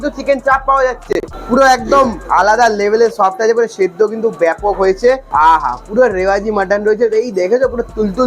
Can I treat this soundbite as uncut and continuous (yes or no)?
no